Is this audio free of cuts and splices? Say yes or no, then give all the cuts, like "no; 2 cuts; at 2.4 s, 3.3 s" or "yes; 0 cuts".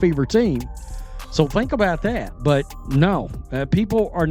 no; 1 cut; at 2.3 s